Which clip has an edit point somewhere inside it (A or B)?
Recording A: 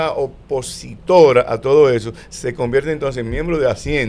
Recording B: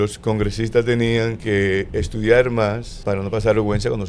B